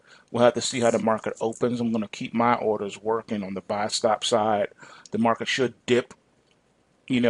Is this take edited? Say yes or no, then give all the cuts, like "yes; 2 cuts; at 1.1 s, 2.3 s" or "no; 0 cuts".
yes; 1 cut; at 2.9 s